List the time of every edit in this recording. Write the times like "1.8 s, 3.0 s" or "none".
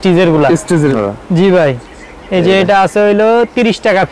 0.9 s